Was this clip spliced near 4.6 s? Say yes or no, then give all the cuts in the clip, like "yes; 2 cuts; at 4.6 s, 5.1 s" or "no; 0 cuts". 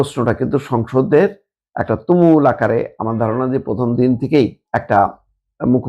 yes; 1 cut; at 4.6 s